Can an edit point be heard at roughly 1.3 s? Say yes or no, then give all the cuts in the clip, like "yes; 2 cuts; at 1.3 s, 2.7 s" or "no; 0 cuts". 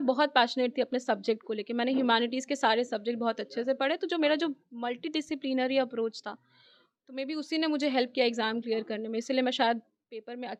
no; 0 cuts